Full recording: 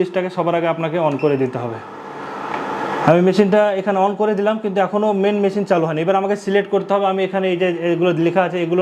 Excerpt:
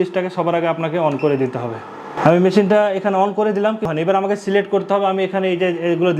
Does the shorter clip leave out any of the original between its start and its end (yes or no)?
yes